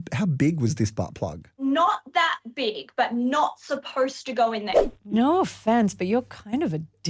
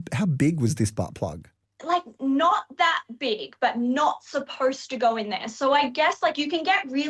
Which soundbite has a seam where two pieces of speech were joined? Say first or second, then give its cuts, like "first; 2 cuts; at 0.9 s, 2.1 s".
first; 2 cuts; at 1.5 s, 5.1 s